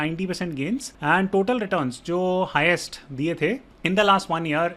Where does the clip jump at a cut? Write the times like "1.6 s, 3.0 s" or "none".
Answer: 0.9 s, 3.7 s

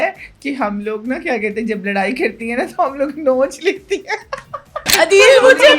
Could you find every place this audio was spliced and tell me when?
4.8 s

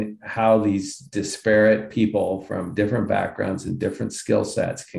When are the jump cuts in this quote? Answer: none

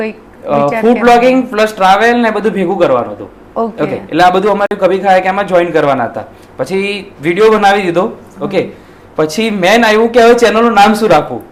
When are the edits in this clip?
none

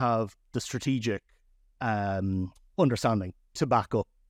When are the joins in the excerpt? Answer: none

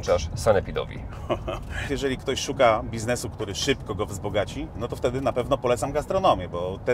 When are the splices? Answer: 1.9 s

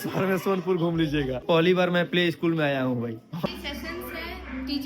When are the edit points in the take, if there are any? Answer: 1.4 s, 3.5 s

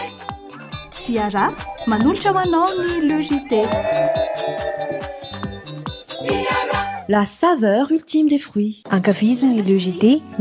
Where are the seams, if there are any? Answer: 8.8 s

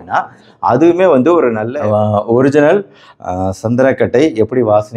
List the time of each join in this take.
1.6 s

